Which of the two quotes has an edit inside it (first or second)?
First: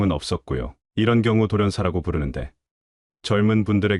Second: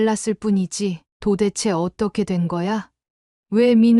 second